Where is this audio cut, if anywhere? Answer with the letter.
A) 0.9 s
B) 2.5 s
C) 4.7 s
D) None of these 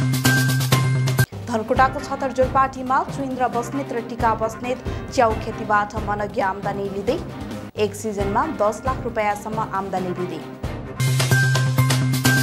A